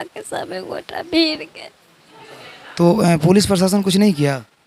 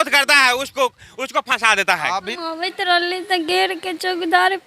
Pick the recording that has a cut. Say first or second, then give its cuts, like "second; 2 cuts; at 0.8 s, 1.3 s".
second; 1 cut; at 2.2 s